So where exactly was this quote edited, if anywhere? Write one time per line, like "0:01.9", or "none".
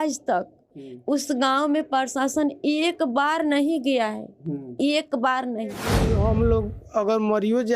0:06.0